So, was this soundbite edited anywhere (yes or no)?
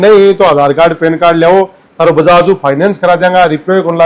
no